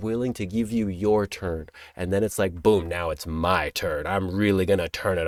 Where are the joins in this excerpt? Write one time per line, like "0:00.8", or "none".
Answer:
none